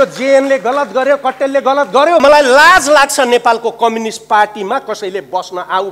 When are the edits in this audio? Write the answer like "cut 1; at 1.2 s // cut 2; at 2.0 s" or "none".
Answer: cut 1; at 2.2 s